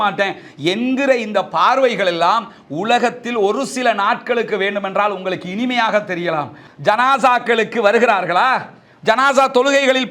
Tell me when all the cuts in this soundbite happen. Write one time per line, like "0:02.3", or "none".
0:06.6